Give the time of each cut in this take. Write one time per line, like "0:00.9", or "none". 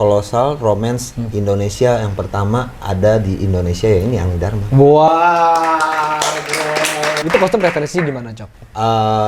0:07.2

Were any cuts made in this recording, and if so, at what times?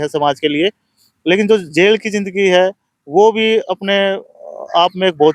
none

